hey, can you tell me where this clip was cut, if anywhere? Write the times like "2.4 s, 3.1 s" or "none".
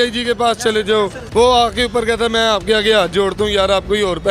1.2 s

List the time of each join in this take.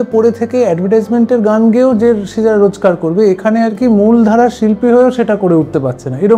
none

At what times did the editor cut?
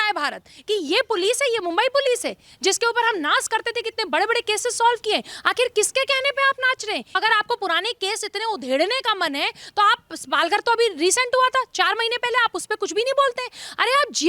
7.2 s

